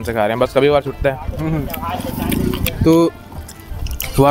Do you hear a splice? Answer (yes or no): no